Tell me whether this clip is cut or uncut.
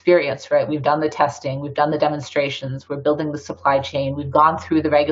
uncut